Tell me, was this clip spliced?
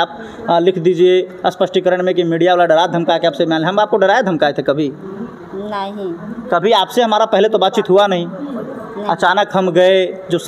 no; 0 cuts

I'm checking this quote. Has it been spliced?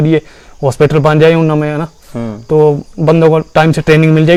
no; 0 cuts

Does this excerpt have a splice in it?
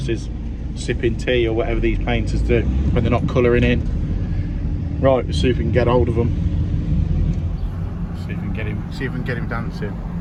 no; 0 cuts

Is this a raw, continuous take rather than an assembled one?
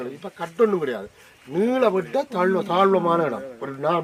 yes; 0 cuts

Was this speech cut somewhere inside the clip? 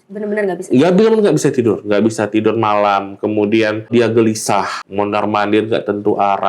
yes; 2 cuts; at 3.9 s, 4.8 s

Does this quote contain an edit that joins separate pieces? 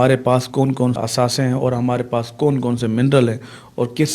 yes; 1 cut; at 1.0 s

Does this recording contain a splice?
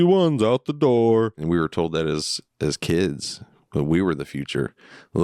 yes; 1 cut; at 1.4 s

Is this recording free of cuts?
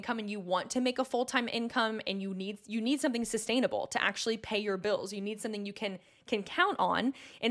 yes; 0 cuts

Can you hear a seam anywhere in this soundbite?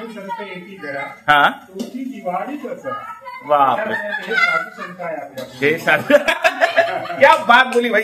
no; 0 cuts

